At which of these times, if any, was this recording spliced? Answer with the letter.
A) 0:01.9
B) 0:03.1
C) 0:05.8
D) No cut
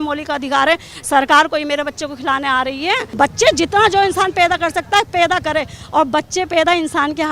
B